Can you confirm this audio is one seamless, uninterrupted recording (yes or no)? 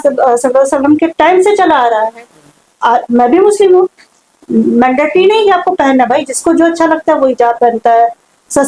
yes